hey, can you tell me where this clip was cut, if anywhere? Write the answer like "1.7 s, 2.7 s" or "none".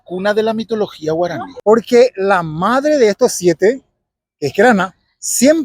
1.5 s